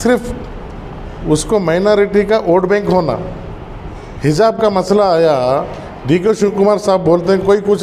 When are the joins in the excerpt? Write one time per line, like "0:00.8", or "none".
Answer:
none